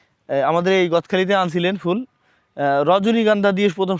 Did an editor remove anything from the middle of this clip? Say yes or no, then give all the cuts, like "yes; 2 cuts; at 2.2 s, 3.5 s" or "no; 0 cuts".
no; 0 cuts